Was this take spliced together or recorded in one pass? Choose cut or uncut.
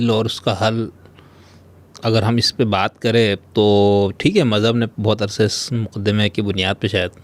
uncut